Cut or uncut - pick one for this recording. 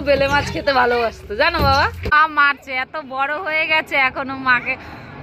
cut